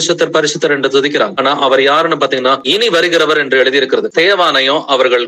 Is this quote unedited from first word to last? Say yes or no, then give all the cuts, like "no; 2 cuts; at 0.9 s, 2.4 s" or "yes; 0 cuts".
no; 3 cuts; at 1.4 s, 2.6 s, 4.1 s